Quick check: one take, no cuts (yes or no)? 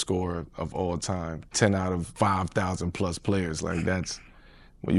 yes